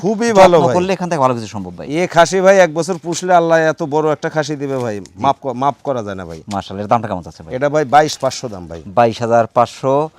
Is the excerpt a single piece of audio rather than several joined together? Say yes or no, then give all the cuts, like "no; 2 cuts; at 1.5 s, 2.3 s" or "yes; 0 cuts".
yes; 0 cuts